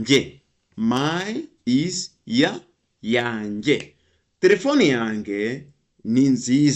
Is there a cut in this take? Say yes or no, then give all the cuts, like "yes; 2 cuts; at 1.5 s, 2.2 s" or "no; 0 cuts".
no; 0 cuts